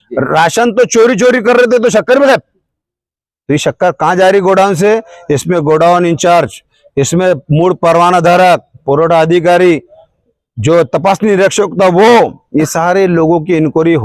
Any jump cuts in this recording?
no; 0 cuts

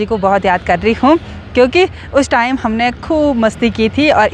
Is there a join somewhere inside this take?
no; 0 cuts

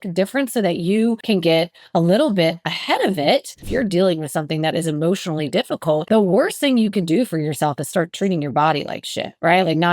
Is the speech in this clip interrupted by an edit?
yes; 3 cuts; at 1.2 s, 3.7 s, 6.0 s

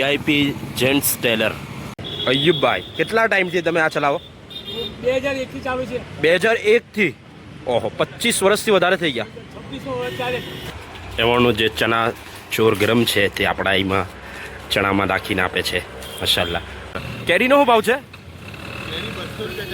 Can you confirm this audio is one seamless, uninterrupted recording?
no; 3 cuts; at 2.0 s, 10.6 s, 17.0 s

